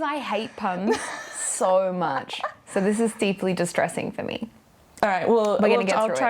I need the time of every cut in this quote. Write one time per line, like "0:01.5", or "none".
none